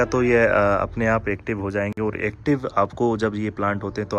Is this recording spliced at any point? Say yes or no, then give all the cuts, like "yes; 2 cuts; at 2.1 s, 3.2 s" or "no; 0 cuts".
no; 0 cuts